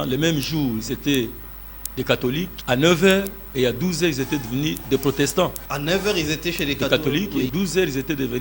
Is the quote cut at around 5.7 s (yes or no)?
yes